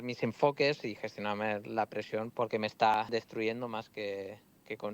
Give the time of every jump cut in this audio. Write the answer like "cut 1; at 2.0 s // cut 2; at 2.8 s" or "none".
cut 1; at 2.9 s